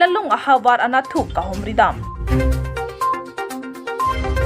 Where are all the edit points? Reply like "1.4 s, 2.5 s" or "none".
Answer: 2.2 s